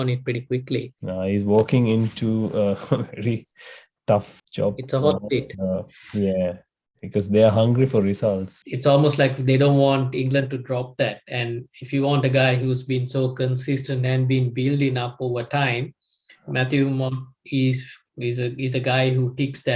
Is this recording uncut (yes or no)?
no